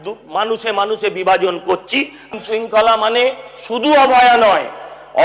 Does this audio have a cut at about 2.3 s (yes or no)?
yes